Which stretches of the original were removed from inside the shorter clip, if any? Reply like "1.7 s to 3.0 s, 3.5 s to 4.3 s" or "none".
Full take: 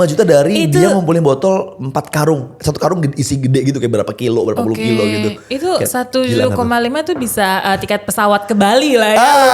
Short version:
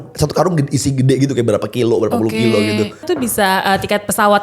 5.5 s to 7.0 s